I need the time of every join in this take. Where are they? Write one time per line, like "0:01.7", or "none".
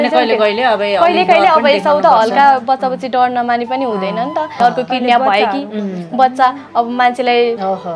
0:04.6